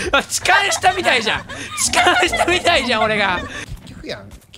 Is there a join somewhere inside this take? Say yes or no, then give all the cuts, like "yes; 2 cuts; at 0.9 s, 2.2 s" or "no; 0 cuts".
yes; 1 cut; at 3.6 s